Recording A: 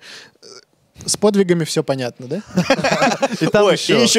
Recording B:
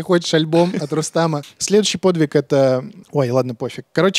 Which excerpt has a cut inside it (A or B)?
B